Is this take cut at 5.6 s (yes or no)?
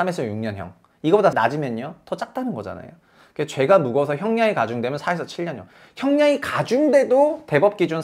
no